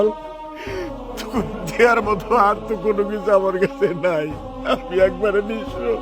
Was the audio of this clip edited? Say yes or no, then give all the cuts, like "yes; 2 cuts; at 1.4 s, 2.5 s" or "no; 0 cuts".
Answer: no; 0 cuts